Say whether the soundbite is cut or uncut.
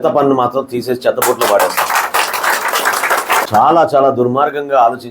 cut